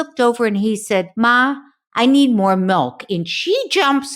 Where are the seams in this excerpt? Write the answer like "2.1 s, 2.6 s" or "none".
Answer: 1.1 s